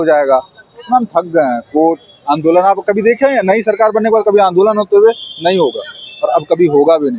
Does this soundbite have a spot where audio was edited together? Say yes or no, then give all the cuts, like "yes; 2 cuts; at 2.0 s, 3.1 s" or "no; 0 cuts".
no; 0 cuts